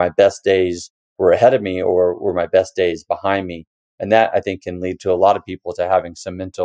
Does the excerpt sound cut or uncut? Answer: uncut